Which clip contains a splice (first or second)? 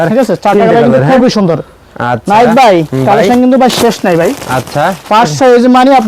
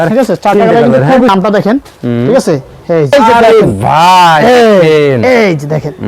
second